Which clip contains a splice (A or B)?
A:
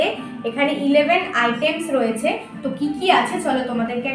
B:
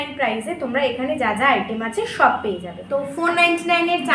B